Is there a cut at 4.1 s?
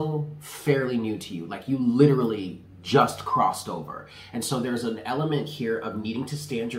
no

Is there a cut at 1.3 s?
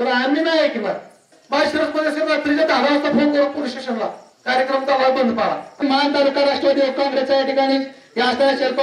yes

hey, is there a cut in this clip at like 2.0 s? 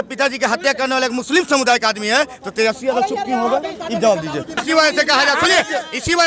no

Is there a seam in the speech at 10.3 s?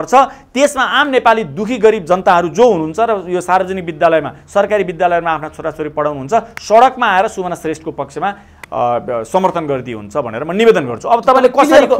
no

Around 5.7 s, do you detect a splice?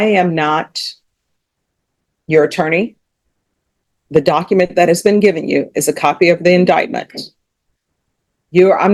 no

